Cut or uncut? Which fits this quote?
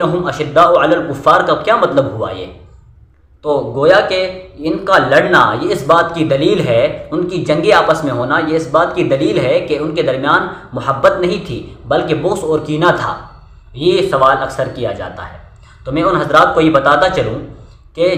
uncut